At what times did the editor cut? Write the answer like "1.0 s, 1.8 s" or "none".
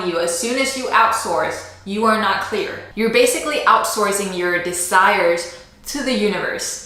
2.8 s